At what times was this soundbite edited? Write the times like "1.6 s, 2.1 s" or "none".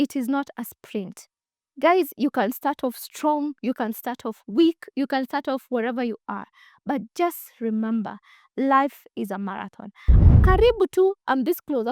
10.1 s